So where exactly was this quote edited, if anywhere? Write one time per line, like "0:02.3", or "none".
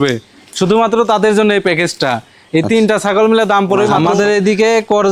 0:03.9